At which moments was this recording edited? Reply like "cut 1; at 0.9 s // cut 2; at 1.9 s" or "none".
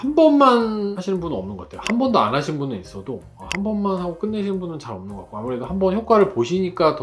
none